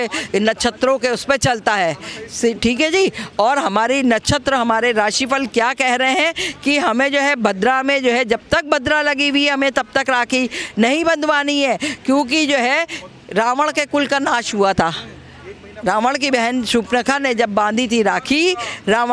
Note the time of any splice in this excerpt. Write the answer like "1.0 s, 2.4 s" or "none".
none